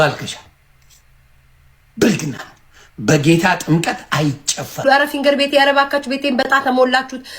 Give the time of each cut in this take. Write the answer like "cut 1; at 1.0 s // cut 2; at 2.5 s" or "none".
cut 1; at 4.7 s